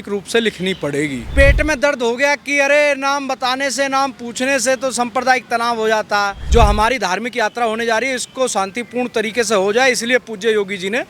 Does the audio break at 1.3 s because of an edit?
yes; 2 cuts; at 1.3 s, 6.4 s

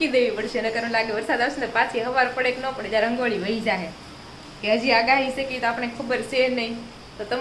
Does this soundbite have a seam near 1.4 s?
no; 0 cuts

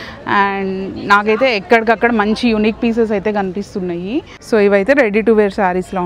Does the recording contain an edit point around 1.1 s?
no; 1 cut; at 4.3 s

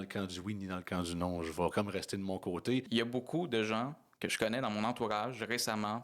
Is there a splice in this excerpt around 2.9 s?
yes; 1 cut; at 2.9 s

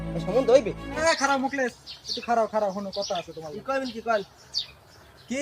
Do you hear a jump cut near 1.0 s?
yes; 1 cut; at 1.0 s

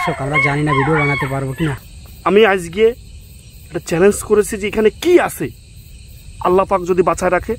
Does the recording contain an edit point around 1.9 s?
yes; 1 cut; at 1.9 s

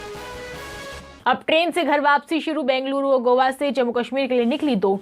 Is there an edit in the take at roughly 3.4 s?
no; 1 cut; at 1.0 s

